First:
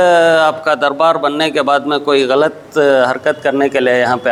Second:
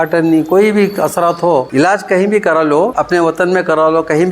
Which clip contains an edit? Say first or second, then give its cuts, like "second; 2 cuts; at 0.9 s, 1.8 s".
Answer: second; 2 cuts; at 1.7 s, 3.0 s